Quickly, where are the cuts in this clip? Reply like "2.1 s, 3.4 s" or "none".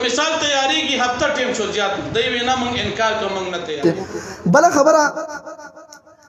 3.8 s